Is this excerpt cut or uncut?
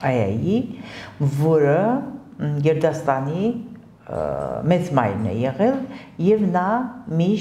uncut